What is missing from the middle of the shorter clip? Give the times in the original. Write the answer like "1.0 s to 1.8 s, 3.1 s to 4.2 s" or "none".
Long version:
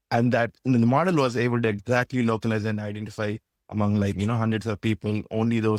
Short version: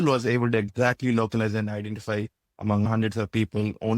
4.0 s to 4.4 s